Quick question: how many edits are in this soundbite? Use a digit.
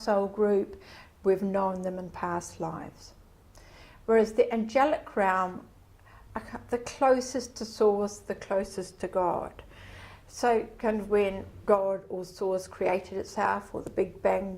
1